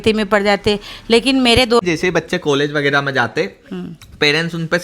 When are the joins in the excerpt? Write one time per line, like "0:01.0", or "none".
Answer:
0:01.8